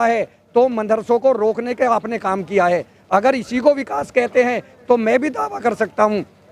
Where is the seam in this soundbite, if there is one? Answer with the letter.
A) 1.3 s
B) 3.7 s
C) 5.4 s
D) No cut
D